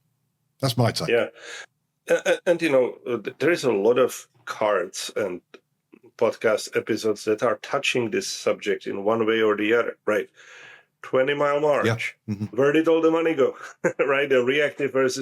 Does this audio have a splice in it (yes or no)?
yes